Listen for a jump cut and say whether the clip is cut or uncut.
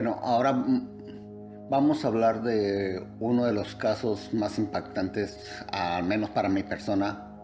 uncut